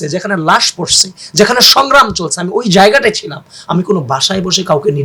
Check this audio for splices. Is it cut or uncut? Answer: uncut